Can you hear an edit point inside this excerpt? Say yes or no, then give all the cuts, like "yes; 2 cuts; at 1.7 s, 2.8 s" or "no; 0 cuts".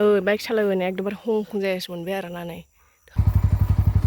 yes; 1 cut; at 3.0 s